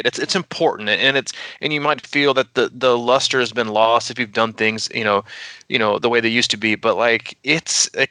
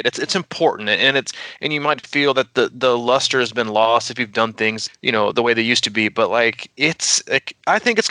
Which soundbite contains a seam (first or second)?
second